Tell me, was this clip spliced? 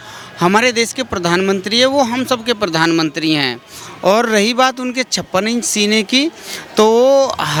no; 0 cuts

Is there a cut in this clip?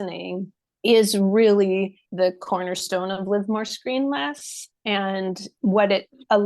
yes; 2 cuts; at 2.0 s, 5.5 s

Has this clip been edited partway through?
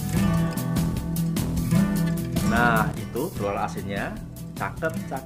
no; 0 cuts

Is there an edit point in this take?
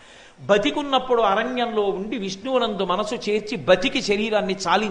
no; 0 cuts

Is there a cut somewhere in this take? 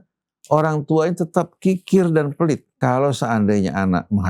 yes; 1 cut; at 2.8 s

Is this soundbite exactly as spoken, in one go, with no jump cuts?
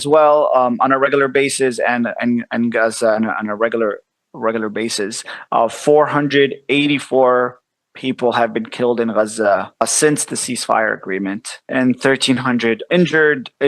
no; 2 cuts; at 9.8 s, 11.7 s

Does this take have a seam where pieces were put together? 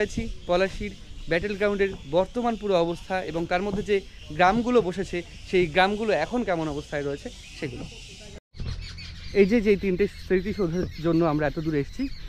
yes; 1 cut; at 8.4 s

